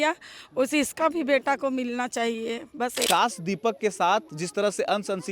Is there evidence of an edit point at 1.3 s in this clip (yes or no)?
no